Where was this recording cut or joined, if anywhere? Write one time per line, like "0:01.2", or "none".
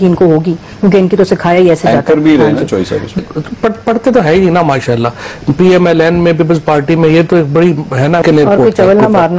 0:03.2
0:08.2